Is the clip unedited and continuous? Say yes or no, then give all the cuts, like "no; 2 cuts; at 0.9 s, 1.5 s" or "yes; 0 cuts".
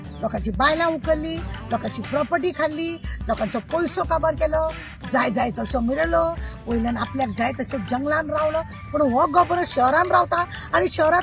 yes; 0 cuts